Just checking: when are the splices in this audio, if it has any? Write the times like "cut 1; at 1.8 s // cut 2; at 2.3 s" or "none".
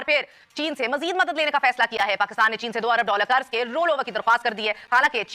none